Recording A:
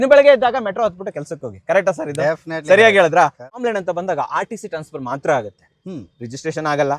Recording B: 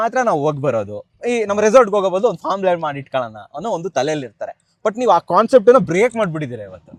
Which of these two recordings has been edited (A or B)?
A